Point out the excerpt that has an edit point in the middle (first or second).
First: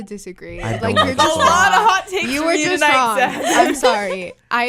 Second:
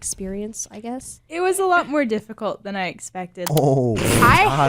second